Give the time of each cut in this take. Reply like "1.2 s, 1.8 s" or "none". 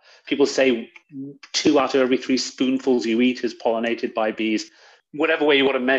4.9 s